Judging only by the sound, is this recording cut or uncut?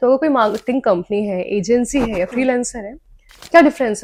uncut